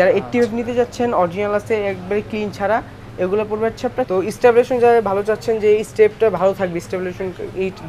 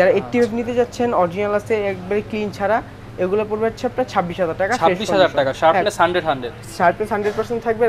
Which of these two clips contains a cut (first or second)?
first